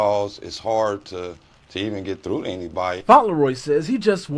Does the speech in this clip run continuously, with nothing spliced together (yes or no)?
yes